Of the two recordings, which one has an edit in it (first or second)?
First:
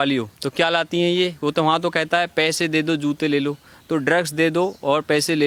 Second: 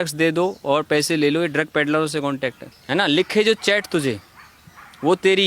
second